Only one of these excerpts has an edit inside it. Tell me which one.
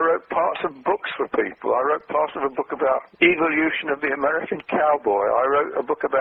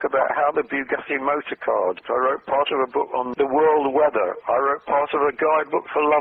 second; 1 cut; at 2.0 s

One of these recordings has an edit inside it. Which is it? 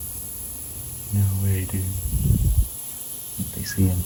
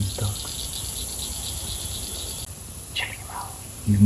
second; 1 cut; at 2.4 s

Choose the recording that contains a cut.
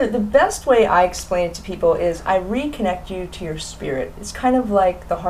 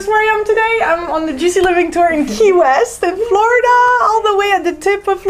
first; 1 cut; at 2.4 s

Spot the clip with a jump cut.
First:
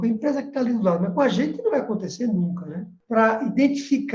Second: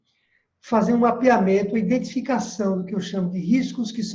first; 1 cut; at 2.9 s

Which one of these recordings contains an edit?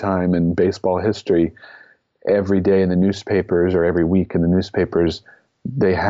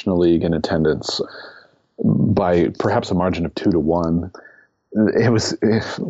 second; 2 cuts; at 1.2 s, 4.4 s

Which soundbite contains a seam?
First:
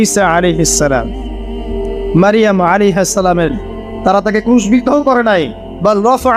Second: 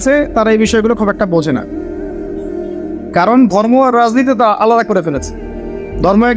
second; 2 cuts; at 1.6 s, 3.1 s

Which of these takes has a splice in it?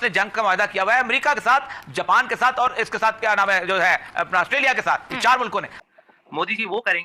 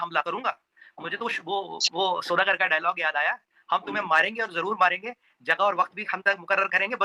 first; 1 cut; at 5.8 s

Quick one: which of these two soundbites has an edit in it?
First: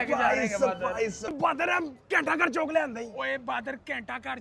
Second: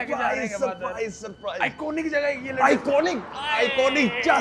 first; 1 cut; at 1.3 s

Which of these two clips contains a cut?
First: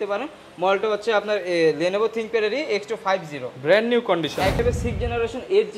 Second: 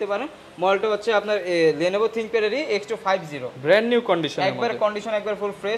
first; 1 cut; at 4.6 s

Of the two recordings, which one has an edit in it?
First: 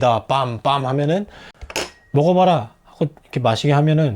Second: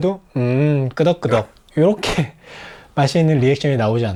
first; 1 cut; at 1.5 s

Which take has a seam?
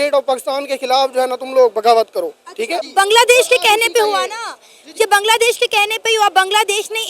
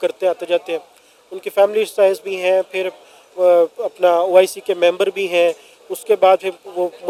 first; 1 cut; at 2.8 s

